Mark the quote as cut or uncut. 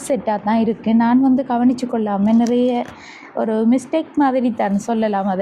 uncut